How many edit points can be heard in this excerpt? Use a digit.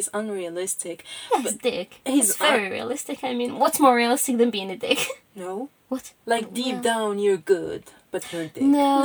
1